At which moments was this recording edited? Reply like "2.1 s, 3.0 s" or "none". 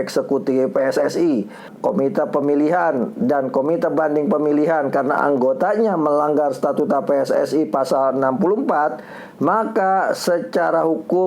1.7 s